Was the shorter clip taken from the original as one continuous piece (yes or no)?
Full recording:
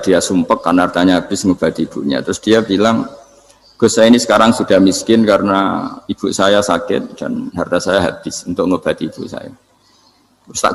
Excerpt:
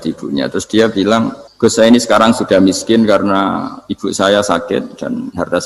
no